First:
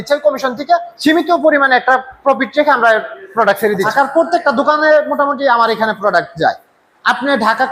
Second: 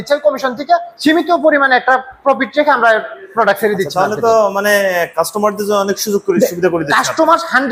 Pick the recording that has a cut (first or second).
first